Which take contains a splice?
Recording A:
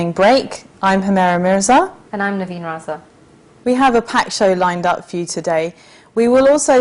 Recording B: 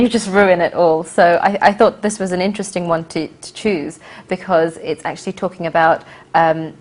B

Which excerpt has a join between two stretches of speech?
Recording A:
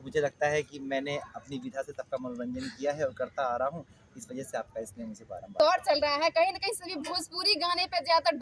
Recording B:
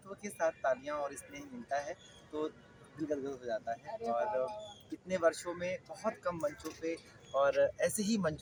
A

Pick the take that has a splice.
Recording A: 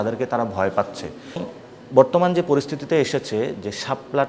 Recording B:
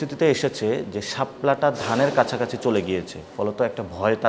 A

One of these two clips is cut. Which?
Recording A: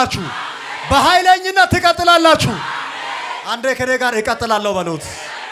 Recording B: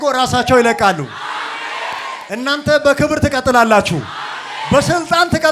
B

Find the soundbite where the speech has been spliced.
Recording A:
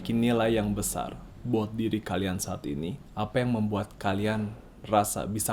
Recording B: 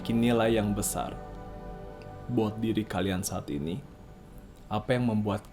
A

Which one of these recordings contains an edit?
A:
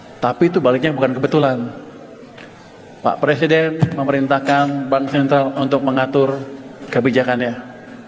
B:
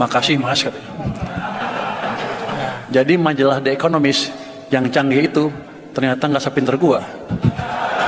B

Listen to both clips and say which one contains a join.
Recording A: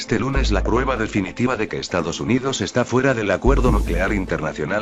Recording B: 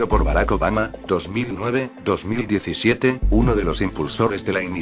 B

